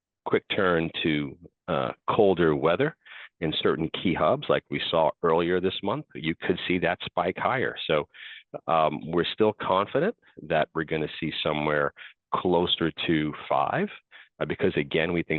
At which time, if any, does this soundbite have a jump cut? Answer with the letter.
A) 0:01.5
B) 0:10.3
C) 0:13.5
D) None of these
D